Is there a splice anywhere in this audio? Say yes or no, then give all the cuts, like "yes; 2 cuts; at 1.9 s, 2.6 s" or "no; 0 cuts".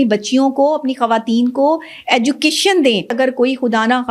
yes; 1 cut; at 3.1 s